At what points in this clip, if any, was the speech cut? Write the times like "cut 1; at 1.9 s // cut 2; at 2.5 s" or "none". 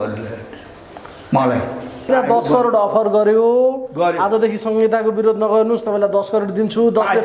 cut 1; at 2.1 s